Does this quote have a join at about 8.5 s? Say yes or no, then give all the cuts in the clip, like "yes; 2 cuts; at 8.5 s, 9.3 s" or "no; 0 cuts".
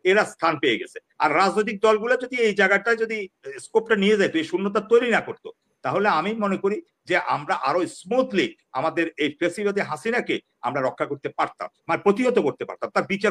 no; 0 cuts